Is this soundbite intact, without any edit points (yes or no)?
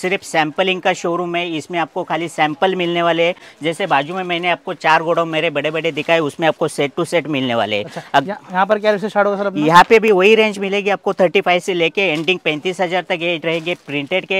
yes